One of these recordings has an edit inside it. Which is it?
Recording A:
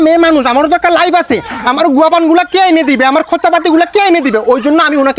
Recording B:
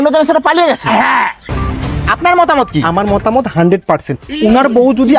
B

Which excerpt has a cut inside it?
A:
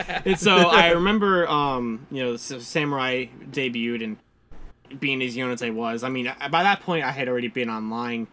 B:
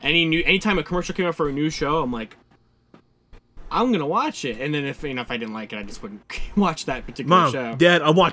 B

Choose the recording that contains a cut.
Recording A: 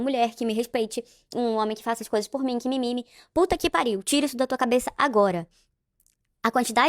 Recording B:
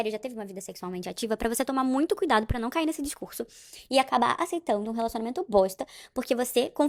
A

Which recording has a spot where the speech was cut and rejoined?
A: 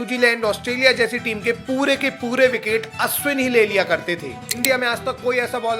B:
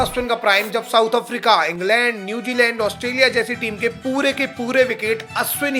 A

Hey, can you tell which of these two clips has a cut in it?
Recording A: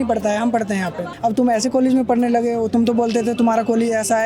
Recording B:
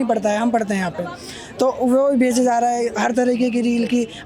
A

